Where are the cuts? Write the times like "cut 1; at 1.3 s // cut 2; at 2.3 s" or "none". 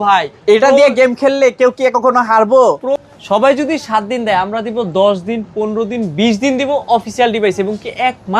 cut 1; at 3.0 s